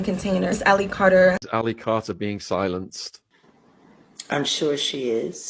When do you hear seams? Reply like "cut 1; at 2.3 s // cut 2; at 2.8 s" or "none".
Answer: cut 1; at 1.4 s